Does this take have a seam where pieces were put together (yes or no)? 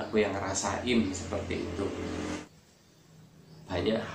yes